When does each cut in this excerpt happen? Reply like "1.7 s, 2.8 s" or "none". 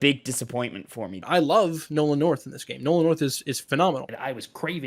1.2 s, 4.1 s